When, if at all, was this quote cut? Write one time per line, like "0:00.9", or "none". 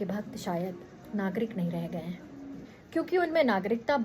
0:00.9
0:02.7

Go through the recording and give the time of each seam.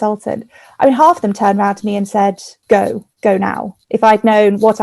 0:02.5
0:03.7

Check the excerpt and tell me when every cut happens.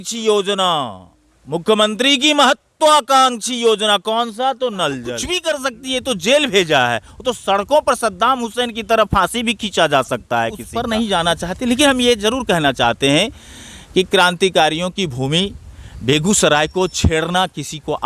0:05.3
0:10.7

